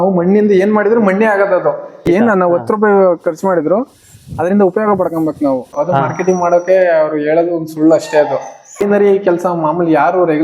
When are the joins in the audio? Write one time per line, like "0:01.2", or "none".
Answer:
0:02.0
0:05.8
0:08.8